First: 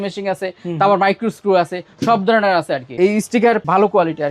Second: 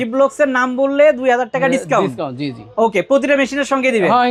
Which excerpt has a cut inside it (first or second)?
first